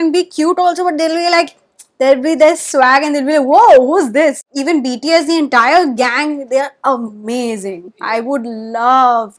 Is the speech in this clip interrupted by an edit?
yes; 1 cut; at 4.5 s

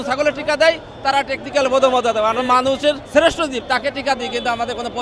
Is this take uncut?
no; 1 cut; at 3.0 s

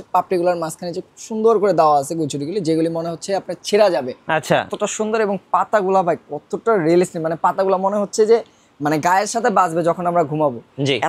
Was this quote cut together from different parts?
no; 0 cuts

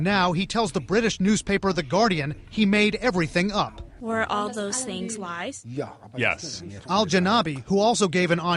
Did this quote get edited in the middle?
no; 0 cuts

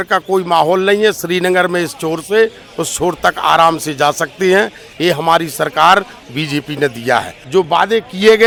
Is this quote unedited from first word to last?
yes; 0 cuts

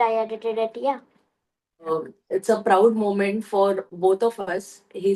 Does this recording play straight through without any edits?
no; 1 cut; at 1.9 s

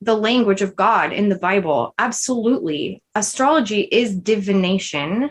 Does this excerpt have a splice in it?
no; 0 cuts

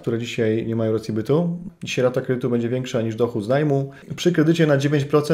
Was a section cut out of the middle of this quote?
yes; 2 cuts; at 1.7 s, 4.1 s

